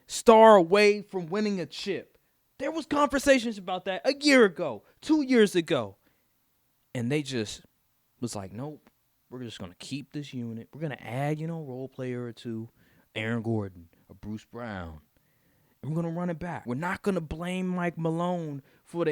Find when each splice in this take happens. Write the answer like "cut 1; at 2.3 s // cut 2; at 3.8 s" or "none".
cut 1; at 16.6 s